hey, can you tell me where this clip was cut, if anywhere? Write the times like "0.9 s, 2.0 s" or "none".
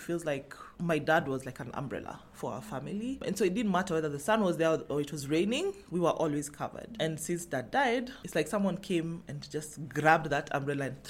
3.2 s, 8.2 s